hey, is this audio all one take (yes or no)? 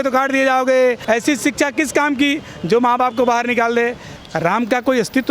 no